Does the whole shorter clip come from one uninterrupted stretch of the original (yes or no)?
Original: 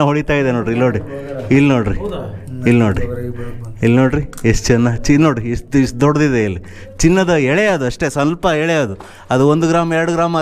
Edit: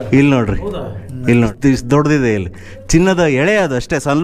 no